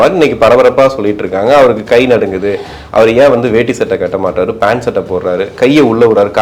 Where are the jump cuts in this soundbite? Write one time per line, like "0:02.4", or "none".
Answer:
none